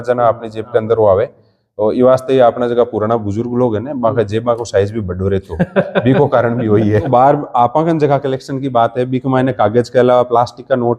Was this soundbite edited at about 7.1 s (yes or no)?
yes